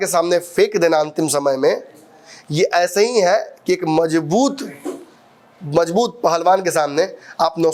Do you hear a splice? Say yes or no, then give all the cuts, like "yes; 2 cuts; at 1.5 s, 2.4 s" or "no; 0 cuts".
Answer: no; 0 cuts